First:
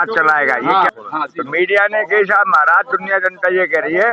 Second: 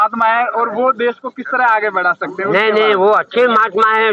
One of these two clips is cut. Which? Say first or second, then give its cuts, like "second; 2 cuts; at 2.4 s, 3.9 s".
first; 1 cut; at 0.9 s